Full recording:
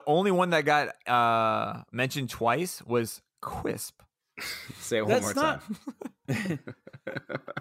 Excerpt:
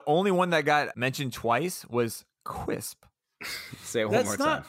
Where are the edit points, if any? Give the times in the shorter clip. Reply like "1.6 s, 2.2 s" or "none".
0.9 s